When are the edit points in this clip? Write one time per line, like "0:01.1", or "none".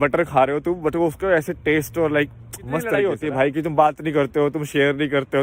0:02.9